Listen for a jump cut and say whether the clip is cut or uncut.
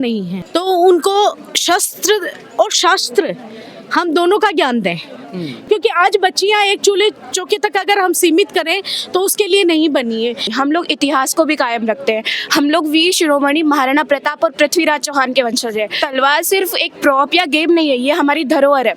cut